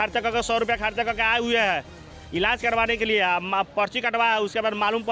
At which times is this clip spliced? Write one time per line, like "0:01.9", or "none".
none